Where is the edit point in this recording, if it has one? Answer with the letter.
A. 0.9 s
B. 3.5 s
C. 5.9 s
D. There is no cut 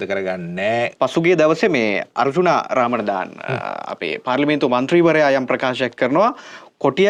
A